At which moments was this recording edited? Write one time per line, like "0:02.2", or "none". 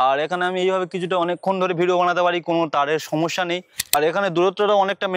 0:03.9